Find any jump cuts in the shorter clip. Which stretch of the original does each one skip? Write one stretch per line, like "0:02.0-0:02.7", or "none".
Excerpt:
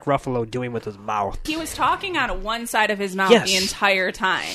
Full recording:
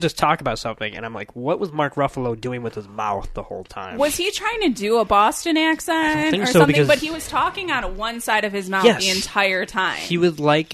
0:03.4-0:07.0